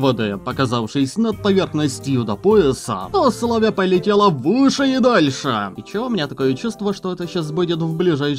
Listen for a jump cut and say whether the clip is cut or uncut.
cut